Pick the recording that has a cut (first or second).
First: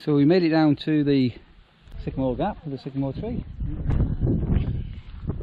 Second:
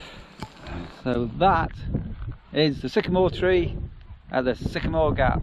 first